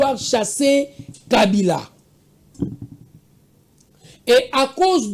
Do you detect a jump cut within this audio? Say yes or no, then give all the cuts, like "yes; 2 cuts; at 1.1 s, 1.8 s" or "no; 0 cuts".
no; 0 cuts